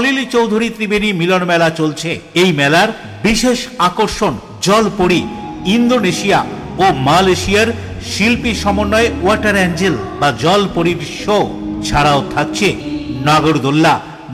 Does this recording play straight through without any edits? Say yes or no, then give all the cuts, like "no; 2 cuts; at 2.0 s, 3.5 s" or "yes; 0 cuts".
yes; 0 cuts